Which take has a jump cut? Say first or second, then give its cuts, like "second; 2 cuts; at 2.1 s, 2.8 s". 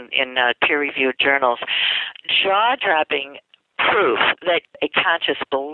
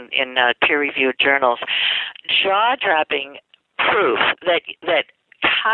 first; 1 cut; at 4.7 s